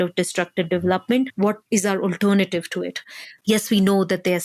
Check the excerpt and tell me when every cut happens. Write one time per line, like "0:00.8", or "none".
0:03.3